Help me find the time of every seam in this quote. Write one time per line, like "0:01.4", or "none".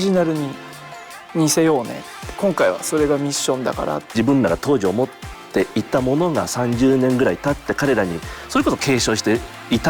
0:04.1